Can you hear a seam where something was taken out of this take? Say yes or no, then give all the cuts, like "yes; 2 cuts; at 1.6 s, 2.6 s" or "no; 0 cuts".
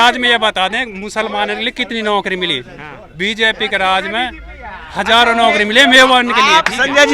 no; 0 cuts